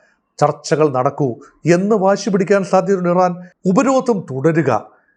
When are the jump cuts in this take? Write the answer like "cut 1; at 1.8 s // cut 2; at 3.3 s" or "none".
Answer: cut 1; at 3.5 s